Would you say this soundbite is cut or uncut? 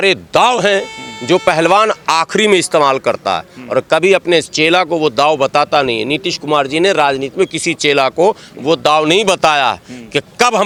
uncut